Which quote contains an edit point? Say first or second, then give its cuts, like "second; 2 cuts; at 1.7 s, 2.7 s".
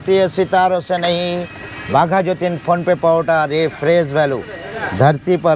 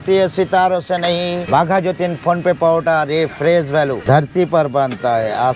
second; 2 cuts; at 1.4 s, 4.0 s